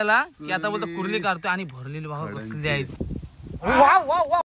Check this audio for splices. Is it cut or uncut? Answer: cut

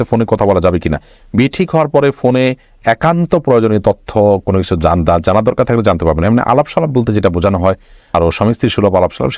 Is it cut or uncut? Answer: uncut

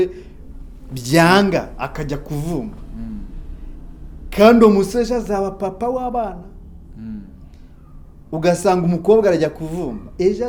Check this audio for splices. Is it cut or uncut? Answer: uncut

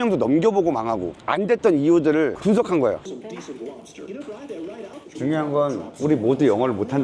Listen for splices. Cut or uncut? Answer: cut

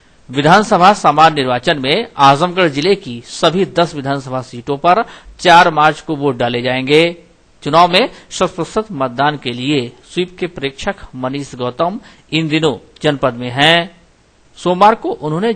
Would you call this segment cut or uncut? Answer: uncut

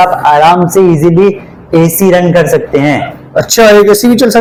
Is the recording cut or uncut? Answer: uncut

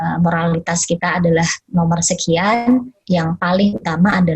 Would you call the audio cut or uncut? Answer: cut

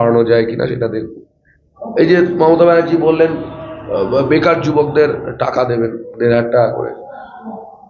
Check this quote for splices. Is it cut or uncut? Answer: uncut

